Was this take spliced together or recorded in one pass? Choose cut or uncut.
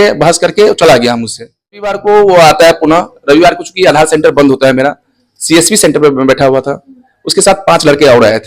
cut